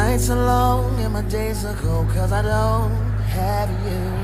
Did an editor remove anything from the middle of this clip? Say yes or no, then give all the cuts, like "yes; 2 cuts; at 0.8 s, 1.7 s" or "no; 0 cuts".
no; 0 cuts